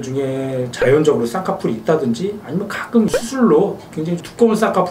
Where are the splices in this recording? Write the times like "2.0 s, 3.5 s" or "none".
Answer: none